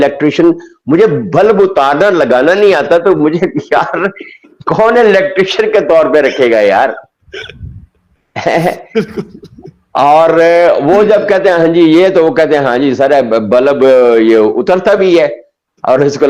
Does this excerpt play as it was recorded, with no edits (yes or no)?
yes